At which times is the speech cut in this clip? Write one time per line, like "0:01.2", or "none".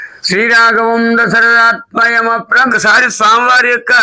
0:02.7